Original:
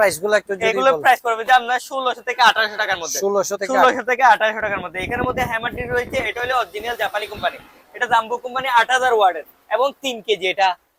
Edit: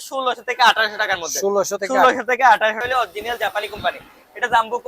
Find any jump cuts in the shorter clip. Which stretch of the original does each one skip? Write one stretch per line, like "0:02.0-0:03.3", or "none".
0:04.6-0:06.4